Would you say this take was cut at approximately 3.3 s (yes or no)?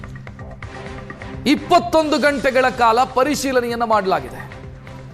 no